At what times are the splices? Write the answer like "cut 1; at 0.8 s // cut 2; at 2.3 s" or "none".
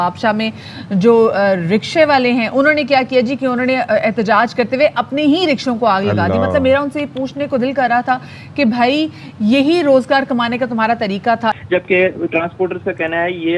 cut 1; at 11.6 s